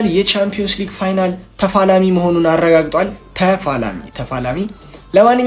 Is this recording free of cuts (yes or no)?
yes